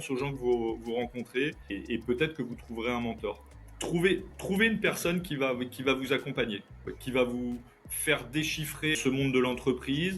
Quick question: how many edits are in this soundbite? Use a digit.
3